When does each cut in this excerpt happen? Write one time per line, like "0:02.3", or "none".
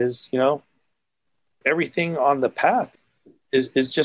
0:01.6
0:02.9

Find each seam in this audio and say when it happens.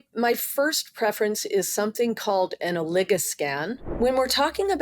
0:03.8

